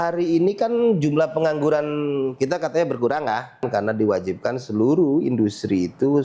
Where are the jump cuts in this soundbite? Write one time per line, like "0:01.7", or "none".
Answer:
0:03.6

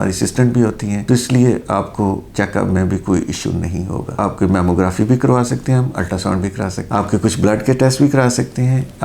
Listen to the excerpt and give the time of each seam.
0:04.1

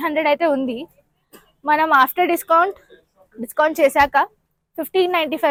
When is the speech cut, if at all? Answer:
none

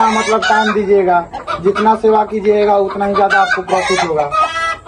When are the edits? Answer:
none

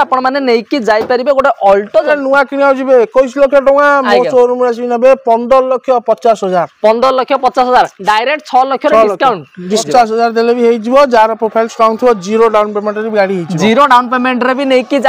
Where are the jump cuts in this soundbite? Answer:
0:02.1
0:09.8

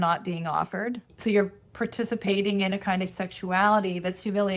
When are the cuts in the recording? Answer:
0:01.1
0:03.1

